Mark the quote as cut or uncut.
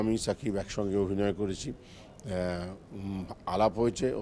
uncut